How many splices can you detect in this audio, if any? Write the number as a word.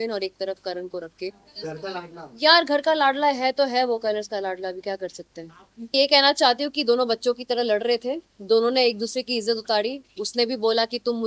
two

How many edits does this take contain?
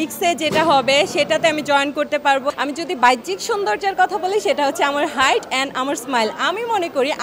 one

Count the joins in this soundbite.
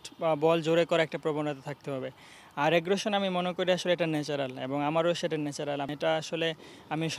one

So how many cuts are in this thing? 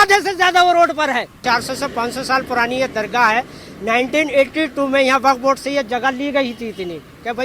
one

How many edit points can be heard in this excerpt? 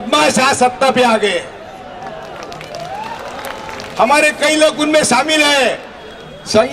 zero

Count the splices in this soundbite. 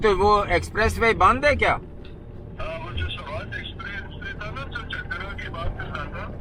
zero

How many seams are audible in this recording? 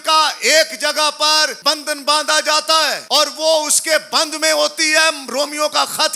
two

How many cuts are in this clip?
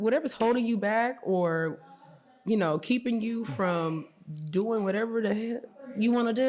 zero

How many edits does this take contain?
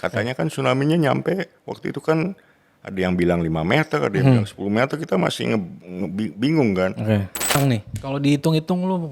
one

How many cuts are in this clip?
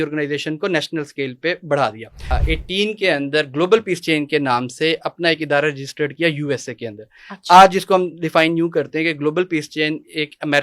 one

